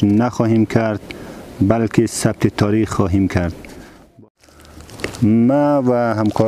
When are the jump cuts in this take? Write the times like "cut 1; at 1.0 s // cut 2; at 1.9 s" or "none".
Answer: cut 1; at 4.1 s